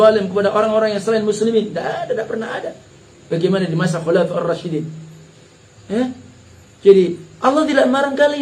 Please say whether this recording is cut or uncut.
uncut